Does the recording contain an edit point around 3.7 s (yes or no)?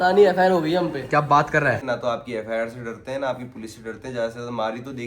no